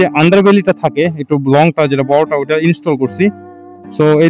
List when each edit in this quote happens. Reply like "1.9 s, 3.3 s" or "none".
none